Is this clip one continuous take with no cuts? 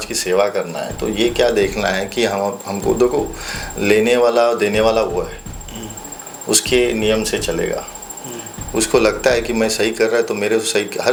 yes; 0 cuts

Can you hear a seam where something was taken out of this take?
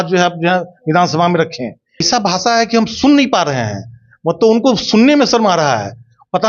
yes; 1 cut; at 2.1 s

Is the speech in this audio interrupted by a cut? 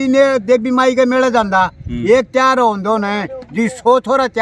no; 0 cuts

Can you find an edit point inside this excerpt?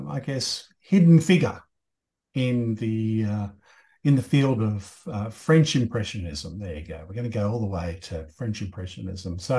no; 0 cuts

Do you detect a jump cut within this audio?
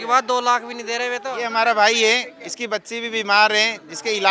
yes; 1 cut; at 1.3 s

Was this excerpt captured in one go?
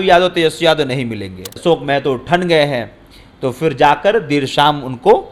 no; 1 cut; at 1.6 s

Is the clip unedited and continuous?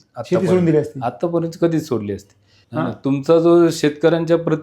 yes; 0 cuts

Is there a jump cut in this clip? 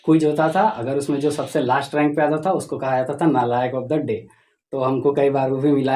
no; 0 cuts

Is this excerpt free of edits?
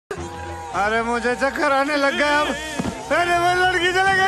yes; 0 cuts

